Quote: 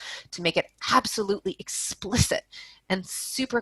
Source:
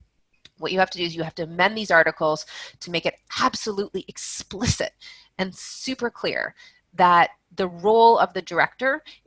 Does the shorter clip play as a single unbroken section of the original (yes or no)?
yes